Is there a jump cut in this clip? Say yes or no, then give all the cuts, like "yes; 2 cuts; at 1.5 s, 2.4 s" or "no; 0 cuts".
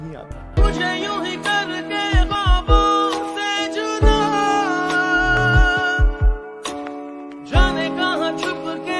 no; 0 cuts